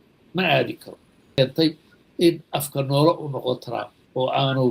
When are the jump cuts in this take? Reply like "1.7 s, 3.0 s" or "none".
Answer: 1.3 s